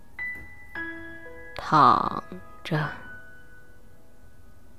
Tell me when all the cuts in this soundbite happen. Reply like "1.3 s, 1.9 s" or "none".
none